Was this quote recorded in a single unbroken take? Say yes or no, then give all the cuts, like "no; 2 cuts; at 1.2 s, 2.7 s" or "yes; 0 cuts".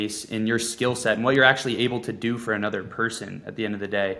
yes; 0 cuts